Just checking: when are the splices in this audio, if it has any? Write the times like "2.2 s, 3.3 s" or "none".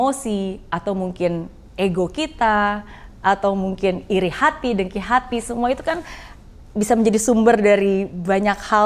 none